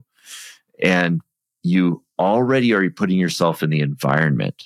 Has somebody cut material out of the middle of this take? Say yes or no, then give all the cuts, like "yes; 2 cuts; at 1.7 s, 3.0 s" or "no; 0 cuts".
no; 0 cuts